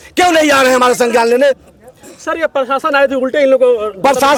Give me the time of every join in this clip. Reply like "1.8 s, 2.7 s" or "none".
none